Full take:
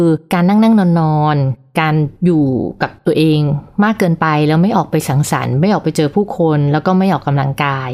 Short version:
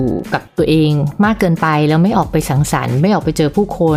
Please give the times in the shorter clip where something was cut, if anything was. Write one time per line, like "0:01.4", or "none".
0:01.1